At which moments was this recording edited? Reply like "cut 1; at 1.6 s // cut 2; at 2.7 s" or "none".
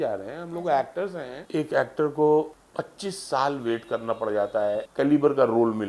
cut 1; at 1.3 s // cut 2; at 2.6 s // cut 3; at 4.9 s